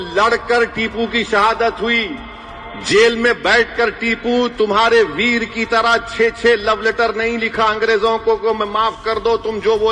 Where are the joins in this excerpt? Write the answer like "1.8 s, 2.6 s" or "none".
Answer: none